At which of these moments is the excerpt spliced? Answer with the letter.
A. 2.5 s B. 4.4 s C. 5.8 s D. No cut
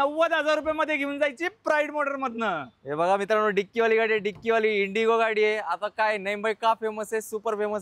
D